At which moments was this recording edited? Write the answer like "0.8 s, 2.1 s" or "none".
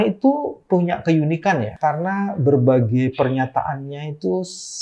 1.7 s